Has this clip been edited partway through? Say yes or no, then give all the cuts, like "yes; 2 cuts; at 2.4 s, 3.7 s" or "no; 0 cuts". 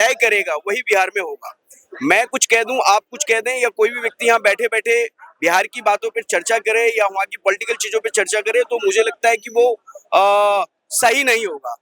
no; 0 cuts